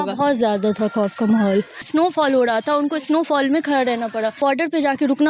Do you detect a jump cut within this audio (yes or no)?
yes